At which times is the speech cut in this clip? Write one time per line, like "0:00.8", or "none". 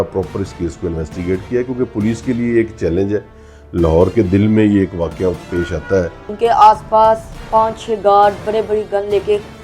0:06.3